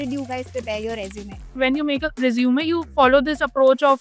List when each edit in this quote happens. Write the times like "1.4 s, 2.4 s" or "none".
1.5 s